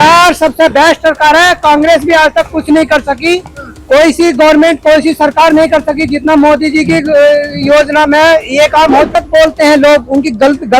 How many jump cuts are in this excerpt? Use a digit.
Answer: 1